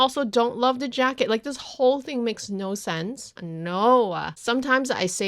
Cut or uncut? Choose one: cut